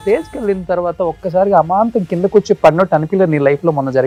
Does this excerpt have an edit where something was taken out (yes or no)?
no